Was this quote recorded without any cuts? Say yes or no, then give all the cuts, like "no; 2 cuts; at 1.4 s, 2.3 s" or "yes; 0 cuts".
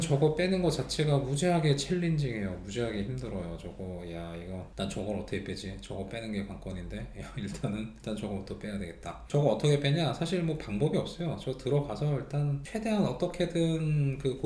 yes; 0 cuts